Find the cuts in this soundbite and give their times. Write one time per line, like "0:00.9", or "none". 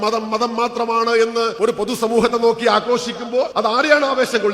0:01.5
0:03.5